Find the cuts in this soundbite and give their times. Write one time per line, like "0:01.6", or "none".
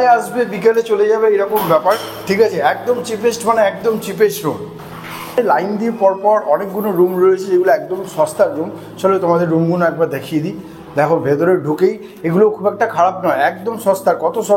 none